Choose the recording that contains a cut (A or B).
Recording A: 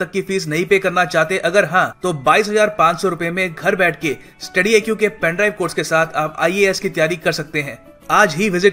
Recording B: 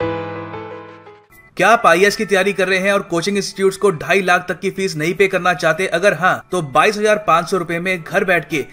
B